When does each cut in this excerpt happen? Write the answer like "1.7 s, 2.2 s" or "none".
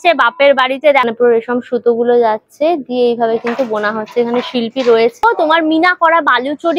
1.1 s, 5.2 s